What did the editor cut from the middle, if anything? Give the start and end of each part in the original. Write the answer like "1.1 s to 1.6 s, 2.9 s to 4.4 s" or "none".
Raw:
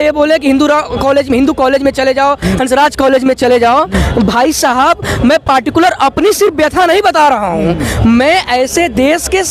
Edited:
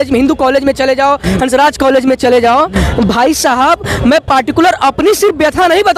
none